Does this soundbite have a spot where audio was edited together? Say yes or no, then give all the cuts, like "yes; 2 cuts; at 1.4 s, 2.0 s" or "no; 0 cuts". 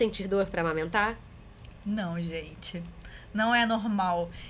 no; 0 cuts